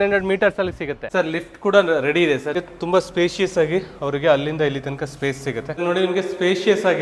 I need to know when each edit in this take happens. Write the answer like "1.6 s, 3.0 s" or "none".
1.0 s, 2.5 s, 5.7 s